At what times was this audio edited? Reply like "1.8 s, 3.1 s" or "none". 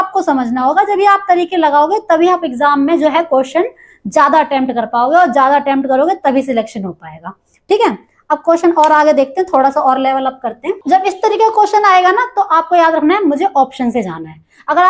10.8 s